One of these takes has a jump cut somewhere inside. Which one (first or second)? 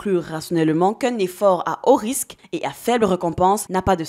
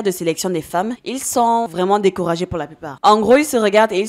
second